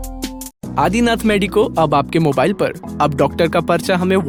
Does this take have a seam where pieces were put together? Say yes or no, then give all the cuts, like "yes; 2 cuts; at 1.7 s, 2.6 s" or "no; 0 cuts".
no; 0 cuts